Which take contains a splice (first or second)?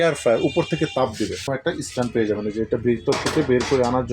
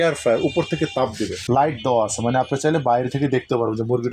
second